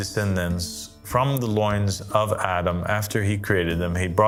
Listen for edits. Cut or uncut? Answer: uncut